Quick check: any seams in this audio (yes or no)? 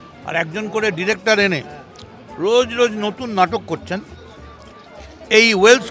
no